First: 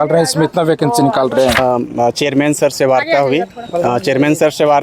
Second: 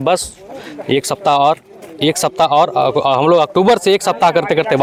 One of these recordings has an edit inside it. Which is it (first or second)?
first